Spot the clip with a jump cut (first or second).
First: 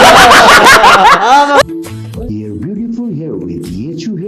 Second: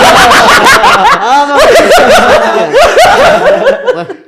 first